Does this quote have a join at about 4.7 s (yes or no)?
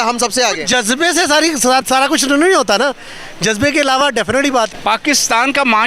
yes